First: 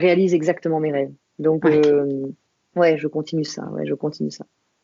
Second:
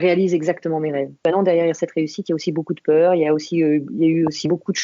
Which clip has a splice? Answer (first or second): second